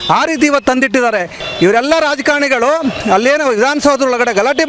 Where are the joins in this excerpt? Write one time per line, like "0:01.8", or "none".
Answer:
0:01.4